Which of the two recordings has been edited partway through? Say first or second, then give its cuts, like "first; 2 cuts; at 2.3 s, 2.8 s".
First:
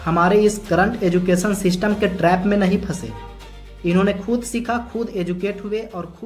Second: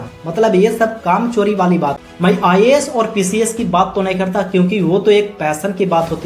second; 1 cut; at 2.1 s